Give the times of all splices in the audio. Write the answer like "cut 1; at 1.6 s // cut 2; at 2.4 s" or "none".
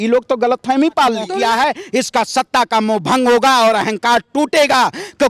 cut 1; at 1.3 s